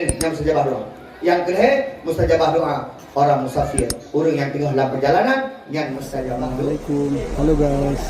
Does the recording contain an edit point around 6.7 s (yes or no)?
yes